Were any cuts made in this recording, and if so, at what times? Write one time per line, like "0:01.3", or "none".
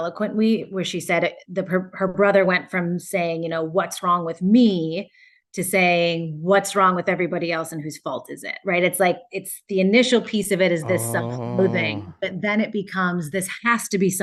none